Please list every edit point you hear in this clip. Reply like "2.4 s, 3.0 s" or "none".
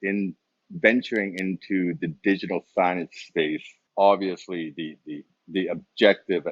3.8 s